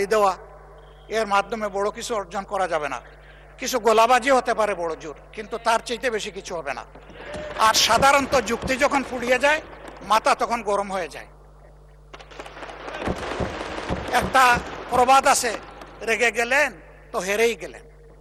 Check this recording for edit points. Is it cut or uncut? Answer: uncut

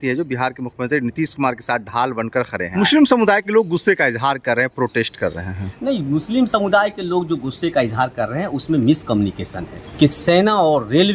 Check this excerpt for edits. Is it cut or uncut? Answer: cut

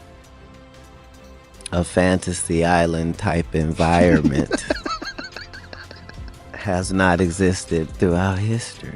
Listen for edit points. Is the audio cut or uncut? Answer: cut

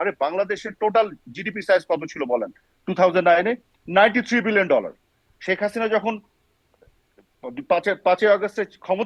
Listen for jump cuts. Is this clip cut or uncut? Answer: uncut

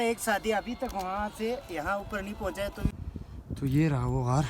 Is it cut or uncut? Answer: cut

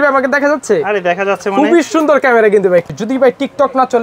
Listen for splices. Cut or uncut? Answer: cut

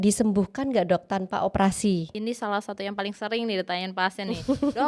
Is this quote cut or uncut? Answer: cut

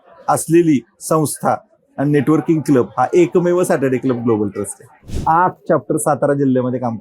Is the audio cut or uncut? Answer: cut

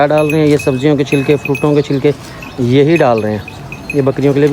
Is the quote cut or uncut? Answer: uncut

